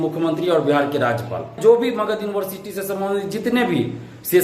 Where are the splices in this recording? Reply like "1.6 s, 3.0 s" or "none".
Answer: 1.6 s